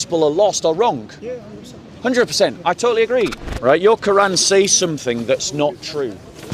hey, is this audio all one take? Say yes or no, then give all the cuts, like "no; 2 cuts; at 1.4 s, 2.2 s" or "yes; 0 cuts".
no; 1 cut; at 3.4 s